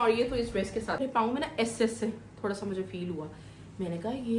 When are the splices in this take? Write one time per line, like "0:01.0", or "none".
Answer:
0:01.0